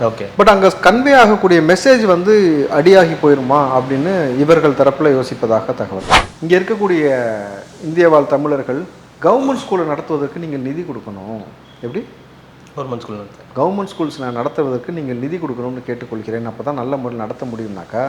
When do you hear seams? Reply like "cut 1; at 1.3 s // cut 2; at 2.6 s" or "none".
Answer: cut 1; at 6.1 s